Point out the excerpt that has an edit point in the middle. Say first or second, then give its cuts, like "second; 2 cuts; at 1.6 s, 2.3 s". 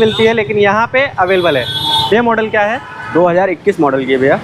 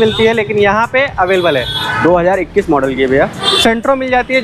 second; 2 cuts; at 1.8 s, 3.4 s